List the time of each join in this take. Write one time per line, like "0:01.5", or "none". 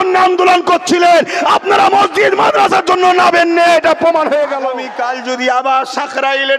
0:04.8